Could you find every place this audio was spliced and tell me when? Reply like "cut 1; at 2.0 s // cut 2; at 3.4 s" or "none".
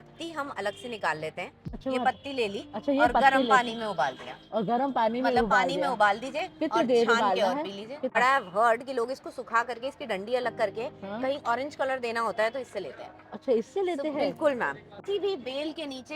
cut 1; at 1.7 s // cut 2; at 8.1 s // cut 3; at 14.9 s